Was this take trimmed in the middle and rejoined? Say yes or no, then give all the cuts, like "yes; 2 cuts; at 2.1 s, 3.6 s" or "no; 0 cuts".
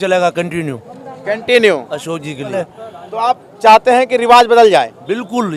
no; 0 cuts